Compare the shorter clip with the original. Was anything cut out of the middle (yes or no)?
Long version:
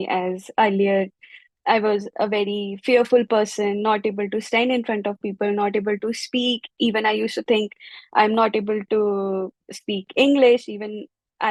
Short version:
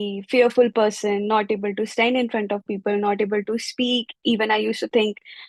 no